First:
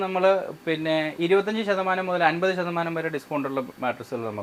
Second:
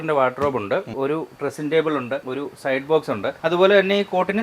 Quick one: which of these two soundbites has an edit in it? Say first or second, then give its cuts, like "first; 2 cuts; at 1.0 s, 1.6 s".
second; 3 cuts; at 0.9 s, 2.3 s, 3.4 s